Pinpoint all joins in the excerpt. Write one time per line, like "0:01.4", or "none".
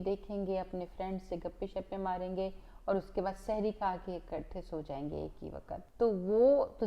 0:05.9